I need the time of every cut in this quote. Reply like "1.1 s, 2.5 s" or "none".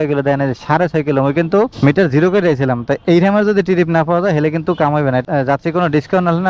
none